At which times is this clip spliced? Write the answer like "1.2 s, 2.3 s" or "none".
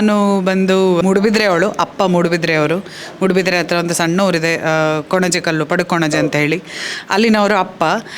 1.0 s